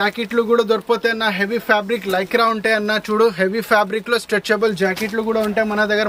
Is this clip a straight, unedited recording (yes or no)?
yes